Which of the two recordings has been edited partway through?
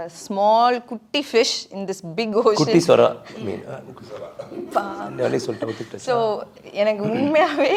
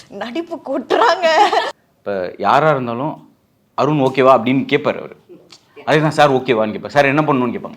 second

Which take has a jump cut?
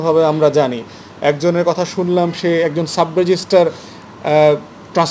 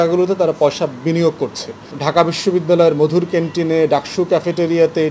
second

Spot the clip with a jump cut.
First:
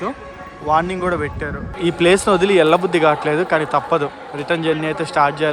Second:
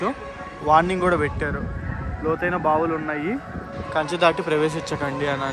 first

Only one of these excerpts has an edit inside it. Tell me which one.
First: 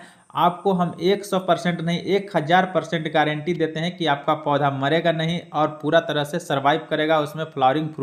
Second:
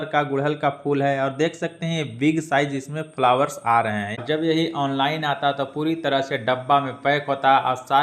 second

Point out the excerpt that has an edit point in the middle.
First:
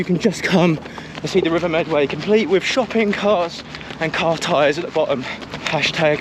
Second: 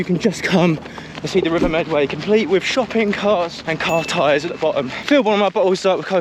second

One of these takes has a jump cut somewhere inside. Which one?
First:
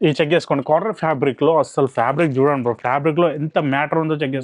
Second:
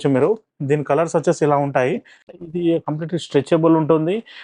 second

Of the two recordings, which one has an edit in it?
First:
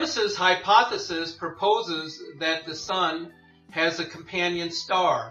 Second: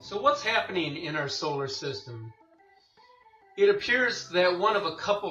first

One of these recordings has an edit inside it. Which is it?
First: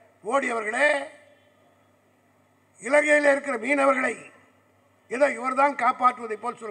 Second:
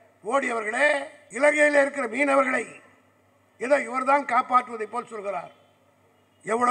second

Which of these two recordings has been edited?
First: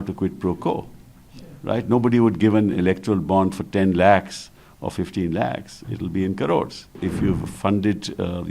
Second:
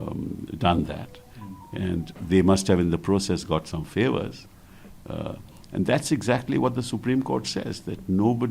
first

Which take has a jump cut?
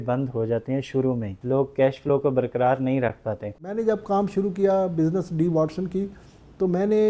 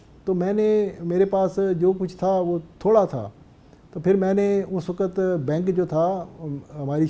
first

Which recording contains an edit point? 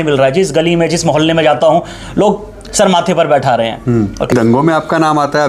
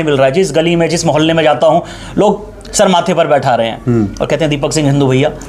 first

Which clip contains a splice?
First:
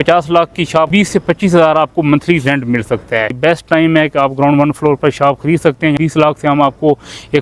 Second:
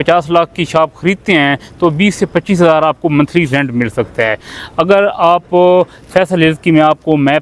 first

